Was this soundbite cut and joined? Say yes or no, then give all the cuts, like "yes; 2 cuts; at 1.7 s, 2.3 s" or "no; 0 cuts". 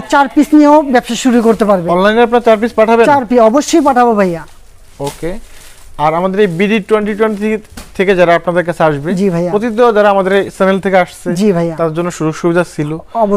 no; 0 cuts